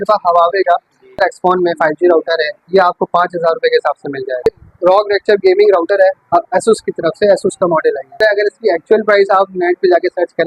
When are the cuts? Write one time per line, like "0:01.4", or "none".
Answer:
0:01.2
0:04.5
0:08.2